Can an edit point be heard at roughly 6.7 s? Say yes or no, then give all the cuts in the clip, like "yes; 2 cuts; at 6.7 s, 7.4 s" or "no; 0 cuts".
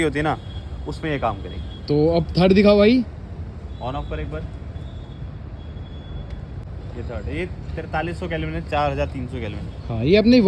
no; 0 cuts